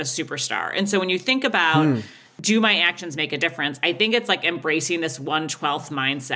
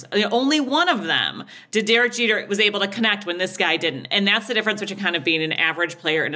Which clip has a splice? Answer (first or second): first